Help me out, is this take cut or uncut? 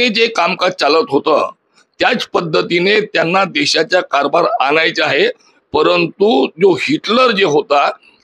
uncut